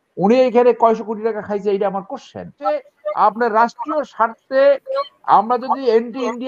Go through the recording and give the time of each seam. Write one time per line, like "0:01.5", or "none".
0:02.5